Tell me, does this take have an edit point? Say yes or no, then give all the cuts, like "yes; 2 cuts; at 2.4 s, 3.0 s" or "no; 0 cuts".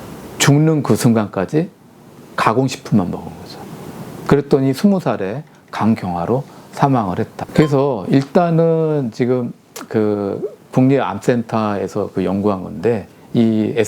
yes; 1 cut; at 7.4 s